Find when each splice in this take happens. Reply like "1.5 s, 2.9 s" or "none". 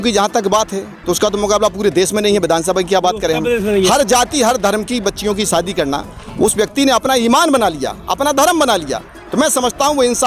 none